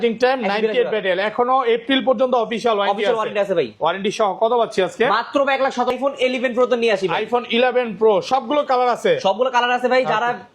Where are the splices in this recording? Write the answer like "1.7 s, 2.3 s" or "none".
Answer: 5.9 s